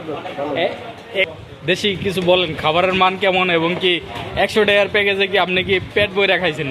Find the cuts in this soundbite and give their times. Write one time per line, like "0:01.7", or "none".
0:01.3